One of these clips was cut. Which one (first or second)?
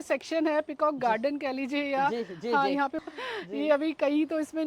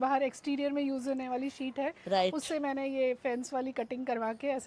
first